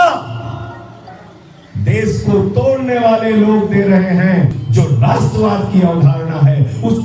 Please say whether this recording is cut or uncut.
cut